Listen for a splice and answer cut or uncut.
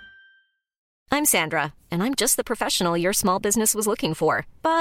cut